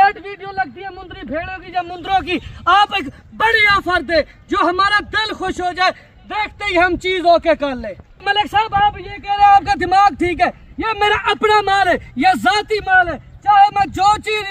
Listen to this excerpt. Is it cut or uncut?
uncut